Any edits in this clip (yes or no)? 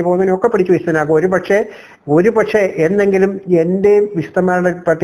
no